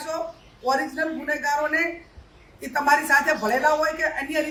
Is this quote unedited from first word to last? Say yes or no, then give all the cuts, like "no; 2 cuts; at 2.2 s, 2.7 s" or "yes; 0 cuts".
yes; 0 cuts